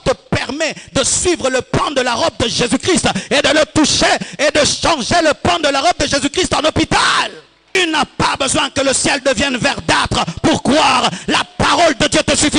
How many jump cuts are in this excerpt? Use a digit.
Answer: 1